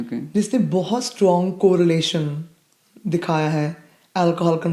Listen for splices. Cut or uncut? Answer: uncut